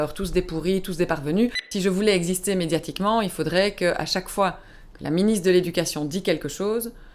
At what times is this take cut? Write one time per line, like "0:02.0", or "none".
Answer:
0:01.6